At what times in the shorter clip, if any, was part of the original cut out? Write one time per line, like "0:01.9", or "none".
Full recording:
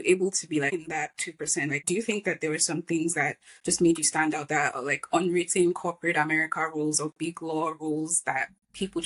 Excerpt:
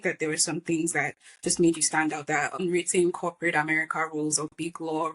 0:02.6

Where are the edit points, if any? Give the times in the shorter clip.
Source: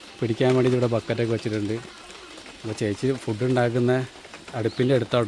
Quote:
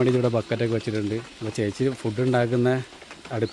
0:01.4

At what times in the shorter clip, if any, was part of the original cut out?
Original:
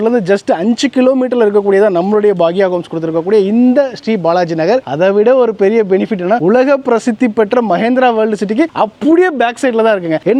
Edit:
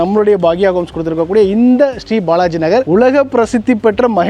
0:02.9

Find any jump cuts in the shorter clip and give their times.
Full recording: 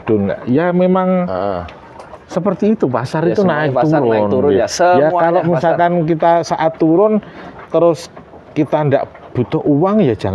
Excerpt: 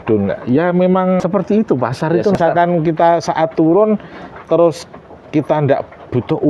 0:01.2
0:02.4

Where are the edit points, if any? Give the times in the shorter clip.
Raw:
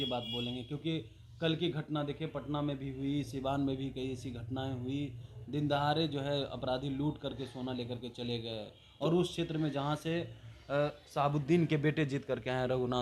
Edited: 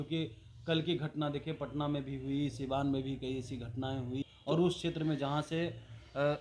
0:04.2

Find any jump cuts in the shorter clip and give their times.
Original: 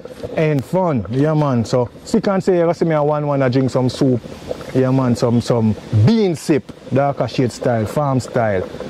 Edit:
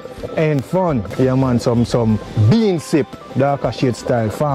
0:01.1

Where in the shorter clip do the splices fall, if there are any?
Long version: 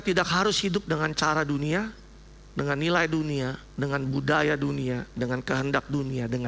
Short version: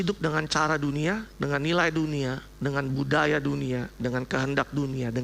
0:01.3

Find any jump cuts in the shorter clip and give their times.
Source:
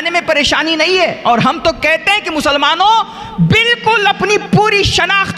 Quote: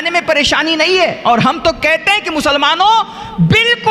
none

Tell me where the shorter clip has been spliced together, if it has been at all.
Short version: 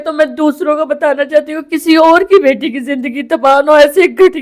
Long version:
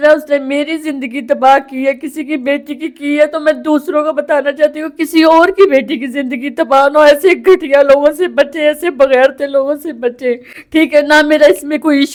none

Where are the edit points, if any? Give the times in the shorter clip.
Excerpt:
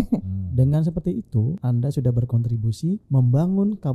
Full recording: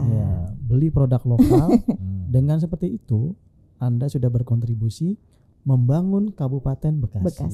0:01.6
0:03.0

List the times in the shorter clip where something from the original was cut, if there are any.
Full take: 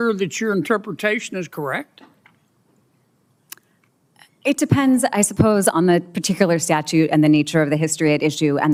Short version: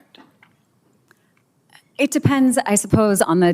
0:01.1

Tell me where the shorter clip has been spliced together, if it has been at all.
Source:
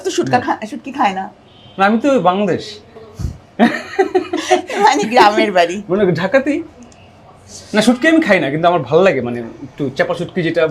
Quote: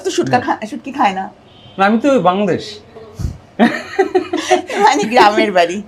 none

